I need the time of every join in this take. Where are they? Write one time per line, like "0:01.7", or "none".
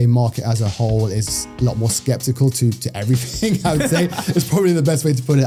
none